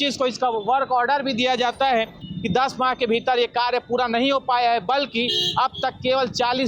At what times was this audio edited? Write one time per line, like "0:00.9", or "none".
0:02.2